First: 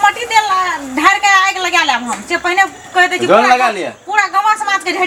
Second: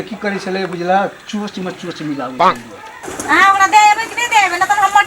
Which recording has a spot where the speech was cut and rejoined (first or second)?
second